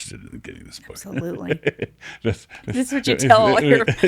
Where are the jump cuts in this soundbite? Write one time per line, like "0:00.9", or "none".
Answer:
0:02.5